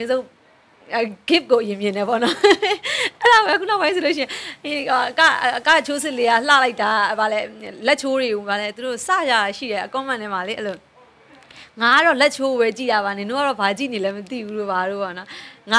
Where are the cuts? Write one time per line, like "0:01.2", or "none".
none